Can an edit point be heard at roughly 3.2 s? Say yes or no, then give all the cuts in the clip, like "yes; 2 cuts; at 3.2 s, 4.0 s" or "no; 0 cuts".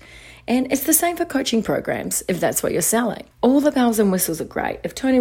yes; 1 cut; at 3.2 s